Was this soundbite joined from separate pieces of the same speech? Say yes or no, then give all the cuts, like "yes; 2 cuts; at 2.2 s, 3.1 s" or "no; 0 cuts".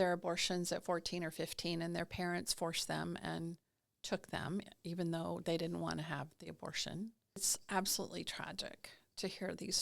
yes; 1 cut; at 7.5 s